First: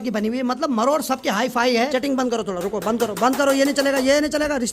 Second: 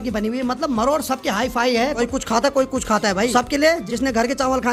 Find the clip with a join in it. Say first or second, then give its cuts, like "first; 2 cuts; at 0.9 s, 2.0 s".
first; 1 cut; at 1.9 s